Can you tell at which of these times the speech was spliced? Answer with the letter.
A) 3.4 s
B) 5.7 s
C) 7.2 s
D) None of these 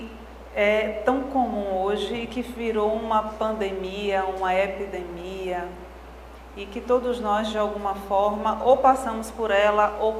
B